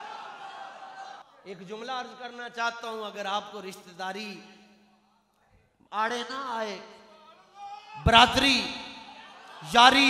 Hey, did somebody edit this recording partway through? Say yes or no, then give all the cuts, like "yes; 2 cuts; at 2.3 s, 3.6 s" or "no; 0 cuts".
yes; 1 cut; at 1.3 s